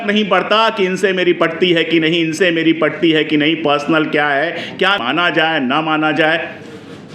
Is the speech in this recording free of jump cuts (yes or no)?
no